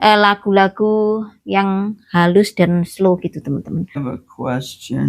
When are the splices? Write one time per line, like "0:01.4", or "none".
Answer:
0:04.0